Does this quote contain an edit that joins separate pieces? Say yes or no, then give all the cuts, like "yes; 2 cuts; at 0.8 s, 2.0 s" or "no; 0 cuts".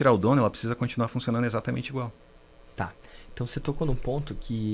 no; 0 cuts